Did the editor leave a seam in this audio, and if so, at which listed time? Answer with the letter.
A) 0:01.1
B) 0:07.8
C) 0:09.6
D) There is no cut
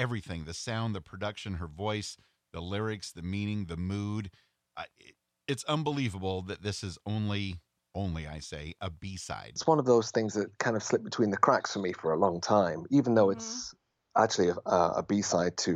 C